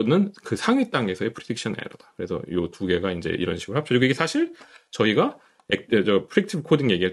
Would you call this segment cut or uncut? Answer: uncut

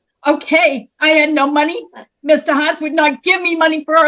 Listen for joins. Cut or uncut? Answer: uncut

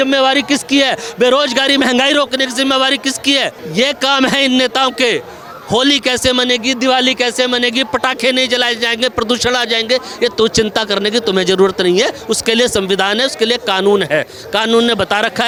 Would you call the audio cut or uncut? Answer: uncut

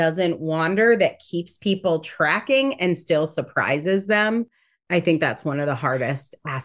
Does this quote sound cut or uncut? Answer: uncut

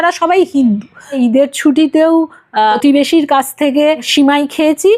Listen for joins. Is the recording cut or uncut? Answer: cut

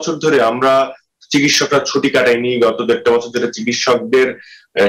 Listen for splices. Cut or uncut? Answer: uncut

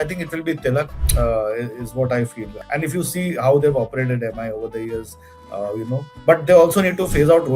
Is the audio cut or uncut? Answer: cut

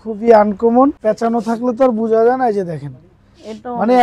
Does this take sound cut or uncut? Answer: cut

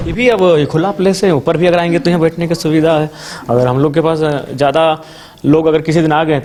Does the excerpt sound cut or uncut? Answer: uncut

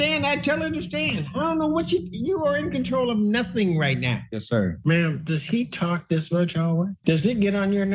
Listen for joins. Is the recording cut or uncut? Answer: cut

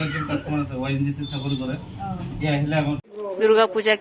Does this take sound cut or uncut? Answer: cut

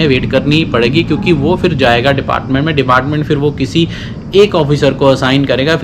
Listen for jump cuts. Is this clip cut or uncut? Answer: uncut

